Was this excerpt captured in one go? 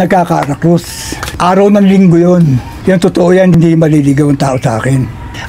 yes; 0 cuts

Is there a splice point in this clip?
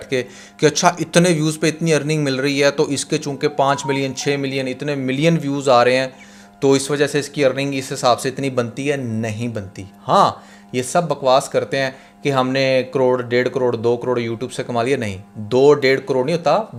no; 0 cuts

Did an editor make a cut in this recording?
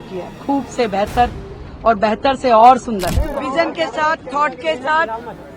yes; 1 cut; at 3.2 s

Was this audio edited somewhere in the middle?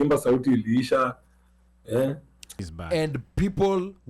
yes; 1 cut; at 2.7 s

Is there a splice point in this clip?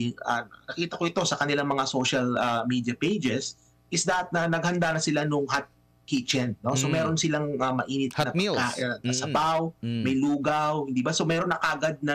no; 0 cuts

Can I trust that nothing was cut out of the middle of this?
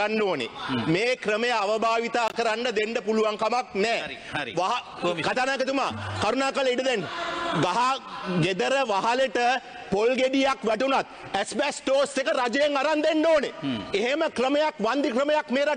yes; 0 cuts

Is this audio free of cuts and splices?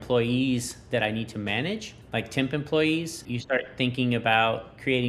no; 2 cuts; at 1.9 s, 3.3 s

